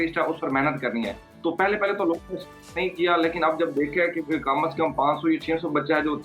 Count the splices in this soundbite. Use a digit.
0